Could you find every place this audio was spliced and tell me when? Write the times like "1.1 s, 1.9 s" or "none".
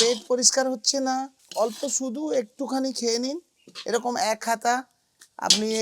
1.4 s